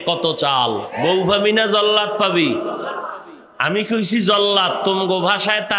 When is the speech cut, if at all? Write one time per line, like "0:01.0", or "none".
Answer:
0:00.9